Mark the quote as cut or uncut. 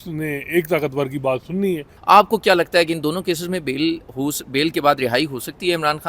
cut